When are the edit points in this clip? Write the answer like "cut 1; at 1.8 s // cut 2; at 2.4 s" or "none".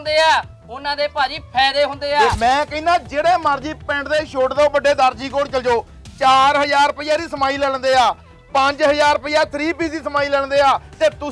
cut 1; at 2.3 s